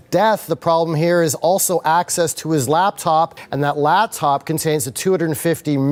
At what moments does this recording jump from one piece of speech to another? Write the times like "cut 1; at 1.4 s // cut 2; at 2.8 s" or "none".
none